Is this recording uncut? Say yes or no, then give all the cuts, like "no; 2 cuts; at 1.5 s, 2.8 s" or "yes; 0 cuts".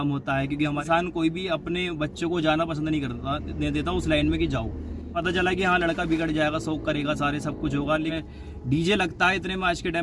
no; 3 cuts; at 0.8 s, 5.1 s, 8.1 s